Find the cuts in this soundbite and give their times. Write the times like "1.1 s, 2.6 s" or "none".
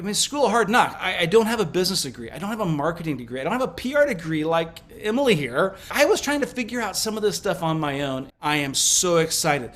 1.0 s, 5.9 s, 8.3 s

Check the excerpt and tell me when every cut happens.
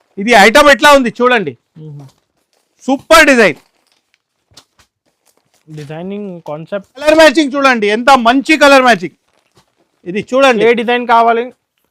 7.1 s

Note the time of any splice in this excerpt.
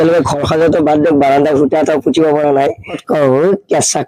3.0 s

